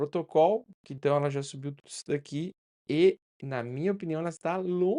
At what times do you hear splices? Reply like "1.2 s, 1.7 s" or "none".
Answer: 1.0 s